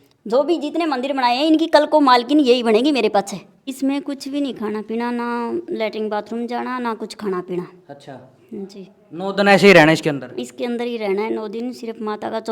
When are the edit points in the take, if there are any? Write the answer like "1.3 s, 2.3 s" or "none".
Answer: 3.7 s